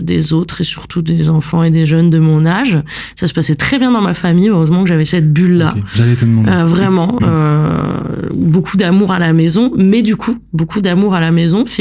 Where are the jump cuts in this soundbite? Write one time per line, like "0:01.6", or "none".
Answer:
none